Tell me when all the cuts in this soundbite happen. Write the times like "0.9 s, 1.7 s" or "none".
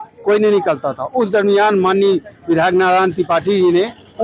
none